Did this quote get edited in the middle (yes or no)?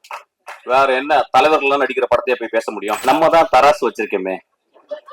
yes